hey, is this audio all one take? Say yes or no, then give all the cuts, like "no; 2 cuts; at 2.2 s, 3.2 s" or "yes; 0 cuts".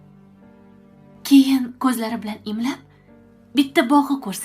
no; 1 cut; at 1.1 s